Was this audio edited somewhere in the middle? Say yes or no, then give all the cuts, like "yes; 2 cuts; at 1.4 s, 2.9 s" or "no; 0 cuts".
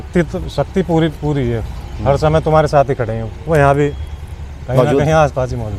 no; 0 cuts